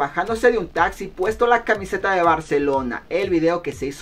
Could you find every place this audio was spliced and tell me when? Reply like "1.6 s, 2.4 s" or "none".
none

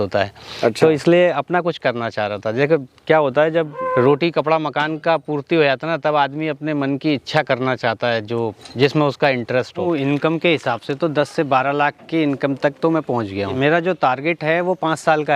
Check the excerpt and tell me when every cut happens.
3.8 s, 9.8 s, 13.6 s

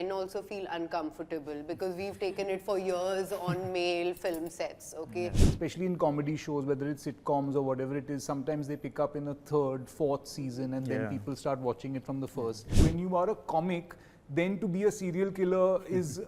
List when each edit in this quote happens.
5.4 s, 12.7 s

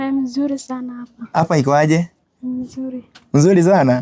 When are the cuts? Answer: none

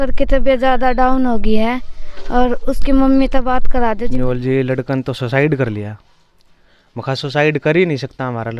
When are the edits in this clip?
4.1 s

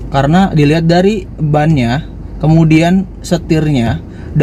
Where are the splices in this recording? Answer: none

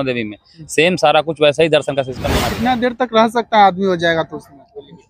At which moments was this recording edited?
2.2 s

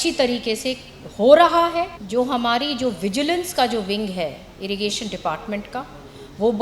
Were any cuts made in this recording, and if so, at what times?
2.0 s

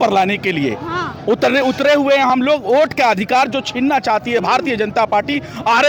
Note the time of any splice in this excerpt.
none

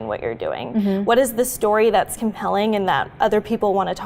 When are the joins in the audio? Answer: none

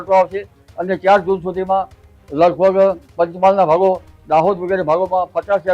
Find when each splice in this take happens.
3.0 s

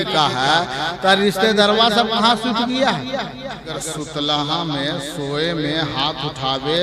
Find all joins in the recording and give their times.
3.8 s

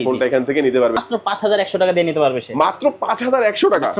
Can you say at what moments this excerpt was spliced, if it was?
1.0 s

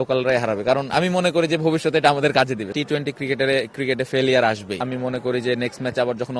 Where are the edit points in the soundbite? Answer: 2.7 s, 4.8 s

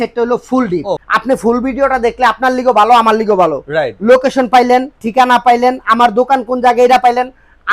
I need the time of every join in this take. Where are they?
1.0 s

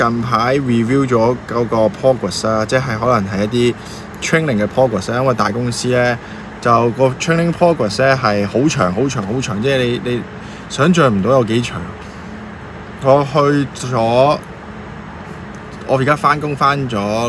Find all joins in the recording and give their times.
none

